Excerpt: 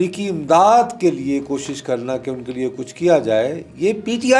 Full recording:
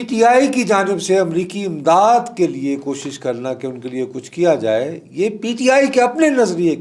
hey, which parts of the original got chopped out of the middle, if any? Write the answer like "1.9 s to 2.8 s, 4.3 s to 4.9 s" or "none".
none